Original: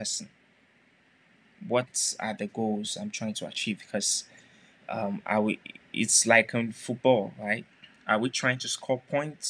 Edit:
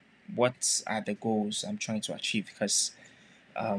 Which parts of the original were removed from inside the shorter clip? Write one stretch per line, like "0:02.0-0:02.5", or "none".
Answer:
none